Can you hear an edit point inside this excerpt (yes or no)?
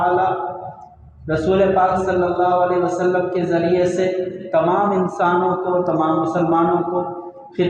no